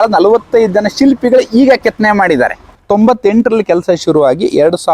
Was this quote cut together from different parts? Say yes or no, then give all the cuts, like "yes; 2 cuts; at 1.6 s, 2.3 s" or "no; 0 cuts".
yes; 1 cut; at 2.8 s